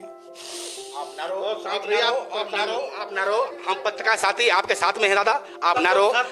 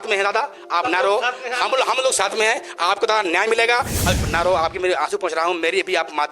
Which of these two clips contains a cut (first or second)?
second